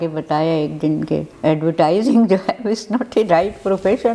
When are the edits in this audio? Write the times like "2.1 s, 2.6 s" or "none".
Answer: 1.3 s